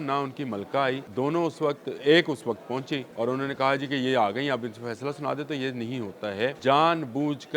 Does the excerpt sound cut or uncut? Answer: cut